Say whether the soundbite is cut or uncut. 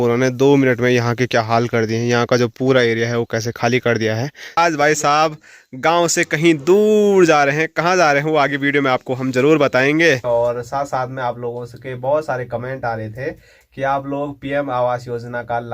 cut